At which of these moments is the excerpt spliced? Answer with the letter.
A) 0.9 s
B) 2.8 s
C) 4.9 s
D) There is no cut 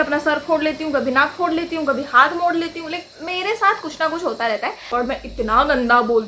C